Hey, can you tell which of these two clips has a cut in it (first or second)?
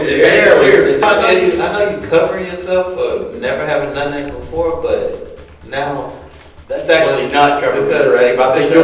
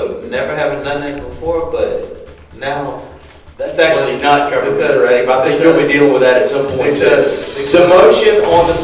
first